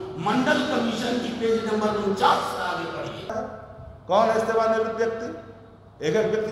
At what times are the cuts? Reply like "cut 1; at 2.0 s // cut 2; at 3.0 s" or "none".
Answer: cut 1; at 3.3 s